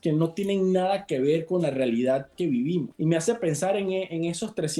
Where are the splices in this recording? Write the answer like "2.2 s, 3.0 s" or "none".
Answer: 2.9 s